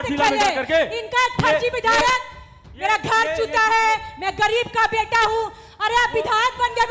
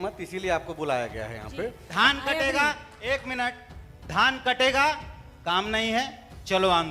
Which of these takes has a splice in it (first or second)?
second